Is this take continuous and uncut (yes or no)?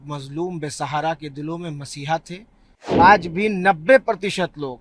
no